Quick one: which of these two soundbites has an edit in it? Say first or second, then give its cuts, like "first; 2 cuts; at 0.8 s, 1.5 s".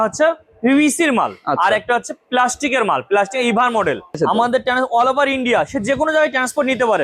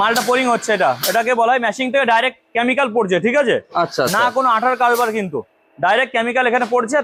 first; 1 cut; at 4.2 s